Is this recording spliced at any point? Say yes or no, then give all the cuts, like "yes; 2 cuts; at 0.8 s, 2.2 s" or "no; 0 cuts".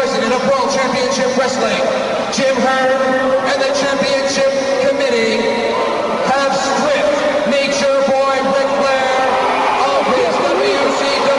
no; 0 cuts